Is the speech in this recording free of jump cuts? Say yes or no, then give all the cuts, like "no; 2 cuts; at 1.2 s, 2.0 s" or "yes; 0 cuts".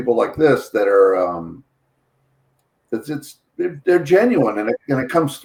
yes; 0 cuts